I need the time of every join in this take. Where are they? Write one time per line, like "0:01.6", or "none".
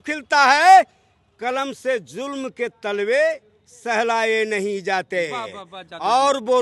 none